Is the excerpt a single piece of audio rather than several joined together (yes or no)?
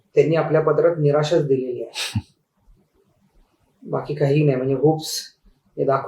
yes